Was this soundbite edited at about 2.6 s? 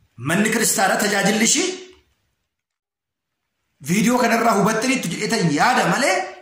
yes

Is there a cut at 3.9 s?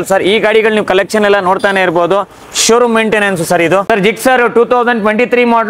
yes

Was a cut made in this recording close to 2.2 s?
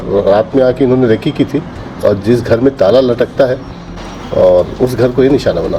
no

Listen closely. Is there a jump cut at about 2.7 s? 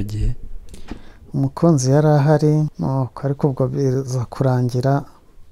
yes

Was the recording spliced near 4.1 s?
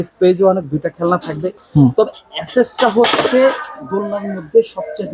no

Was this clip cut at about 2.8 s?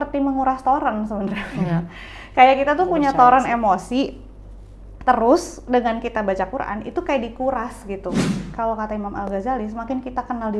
no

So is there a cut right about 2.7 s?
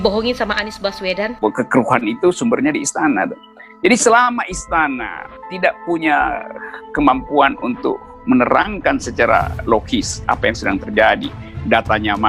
no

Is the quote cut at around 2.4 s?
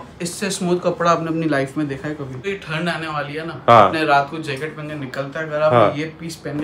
yes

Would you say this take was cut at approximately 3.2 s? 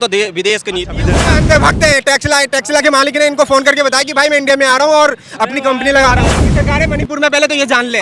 no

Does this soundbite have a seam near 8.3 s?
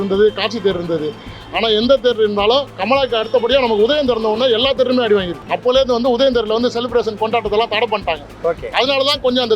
no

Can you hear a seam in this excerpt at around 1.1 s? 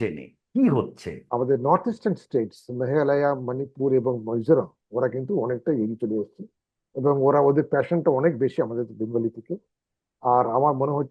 yes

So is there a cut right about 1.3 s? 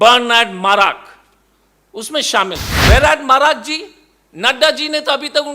no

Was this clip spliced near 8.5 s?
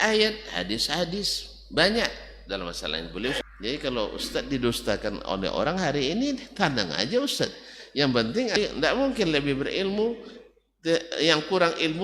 yes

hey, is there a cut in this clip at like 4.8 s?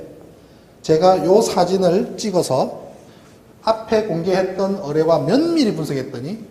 yes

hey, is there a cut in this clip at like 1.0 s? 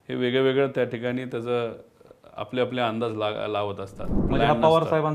no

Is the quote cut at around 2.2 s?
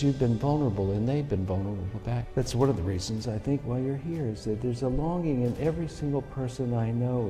yes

